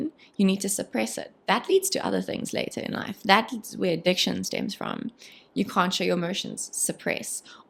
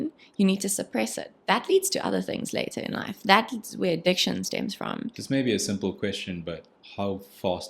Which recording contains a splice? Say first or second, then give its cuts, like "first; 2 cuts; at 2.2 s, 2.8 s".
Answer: second; 2 cuts; at 5.1 s, 6.8 s